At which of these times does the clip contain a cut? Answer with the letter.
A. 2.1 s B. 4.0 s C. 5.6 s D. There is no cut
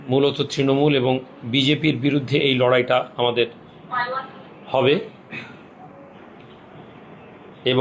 D